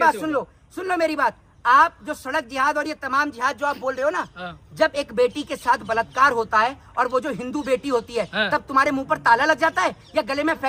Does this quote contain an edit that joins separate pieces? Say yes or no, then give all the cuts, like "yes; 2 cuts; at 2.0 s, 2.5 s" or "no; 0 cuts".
no; 0 cuts